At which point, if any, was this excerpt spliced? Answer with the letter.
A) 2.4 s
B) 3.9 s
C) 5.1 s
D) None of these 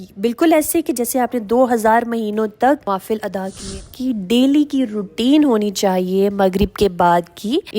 B